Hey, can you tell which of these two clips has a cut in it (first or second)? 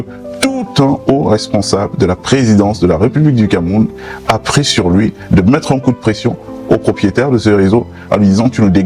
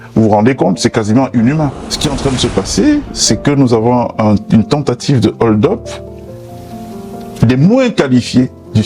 second